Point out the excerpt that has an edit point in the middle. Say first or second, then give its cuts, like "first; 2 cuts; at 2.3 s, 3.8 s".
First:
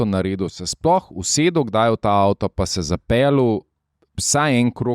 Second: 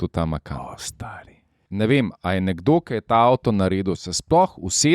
second; 1 cut; at 1.6 s